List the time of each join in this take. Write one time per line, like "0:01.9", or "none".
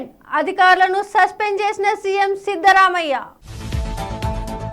none